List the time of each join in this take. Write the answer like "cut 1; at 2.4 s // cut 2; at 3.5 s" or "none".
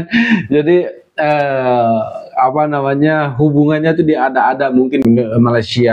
cut 1; at 5.0 s